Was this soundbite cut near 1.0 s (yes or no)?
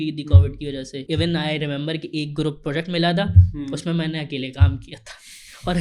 yes